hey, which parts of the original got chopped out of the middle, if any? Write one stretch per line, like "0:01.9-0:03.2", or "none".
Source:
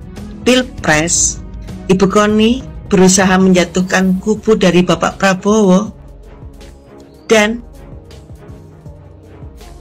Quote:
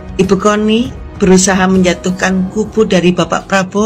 none

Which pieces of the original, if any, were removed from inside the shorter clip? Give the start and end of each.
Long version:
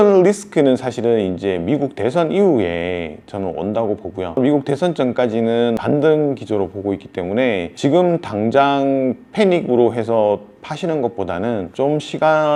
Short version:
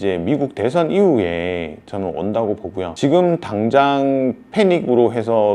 0:04.3-0:07.7

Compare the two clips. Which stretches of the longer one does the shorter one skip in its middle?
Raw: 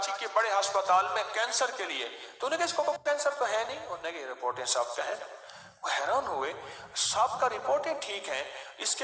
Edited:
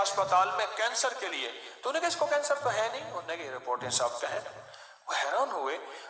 0:02.9-0:03.0

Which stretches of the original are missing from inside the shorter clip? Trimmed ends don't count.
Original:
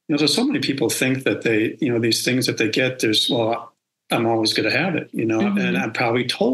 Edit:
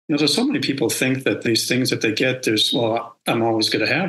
0:01.5-0:02.0
0:03.7-0:04.0

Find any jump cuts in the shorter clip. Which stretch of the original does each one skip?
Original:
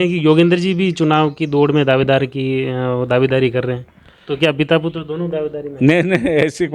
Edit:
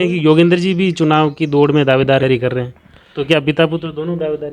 0:02.2-0:03.3

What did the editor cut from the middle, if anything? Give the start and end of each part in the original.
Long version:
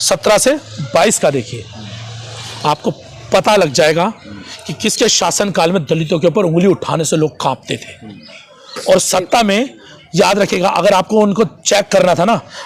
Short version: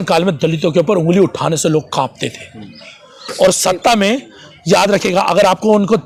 none

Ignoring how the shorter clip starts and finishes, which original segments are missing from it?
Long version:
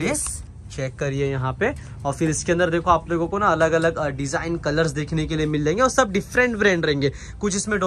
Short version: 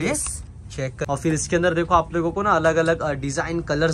0:01.0-0:02.0

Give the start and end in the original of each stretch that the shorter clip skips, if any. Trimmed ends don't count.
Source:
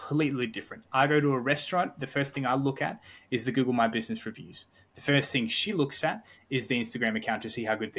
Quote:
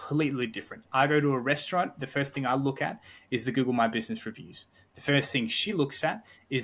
none

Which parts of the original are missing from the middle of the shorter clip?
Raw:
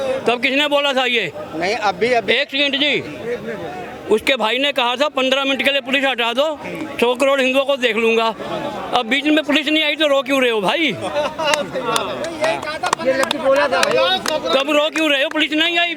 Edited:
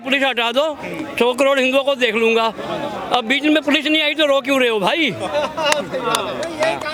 none

